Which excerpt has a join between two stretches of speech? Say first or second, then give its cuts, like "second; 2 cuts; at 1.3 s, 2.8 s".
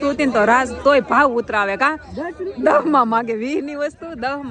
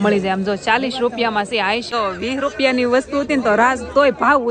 second; 1 cut; at 1.9 s